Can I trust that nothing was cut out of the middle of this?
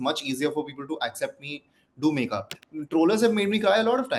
no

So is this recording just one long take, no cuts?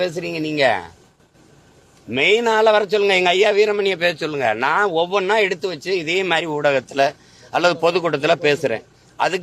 yes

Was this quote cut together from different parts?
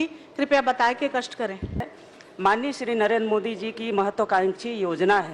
yes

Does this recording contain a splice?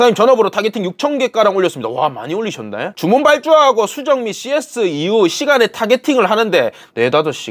no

